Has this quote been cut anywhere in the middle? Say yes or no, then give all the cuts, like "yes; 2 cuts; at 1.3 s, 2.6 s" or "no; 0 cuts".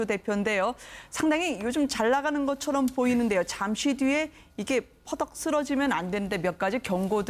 no; 0 cuts